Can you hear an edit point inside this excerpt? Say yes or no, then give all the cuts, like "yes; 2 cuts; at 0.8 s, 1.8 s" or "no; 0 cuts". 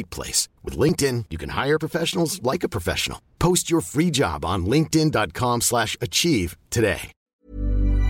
yes; 1 cut; at 7.2 s